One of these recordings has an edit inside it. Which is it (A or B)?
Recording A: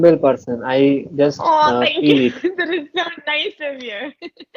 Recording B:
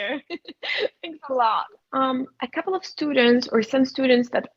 B